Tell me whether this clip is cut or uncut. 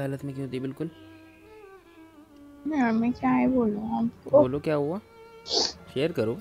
uncut